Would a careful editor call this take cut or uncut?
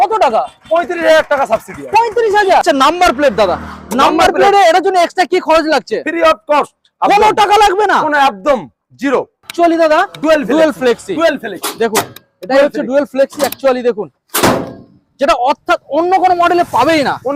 cut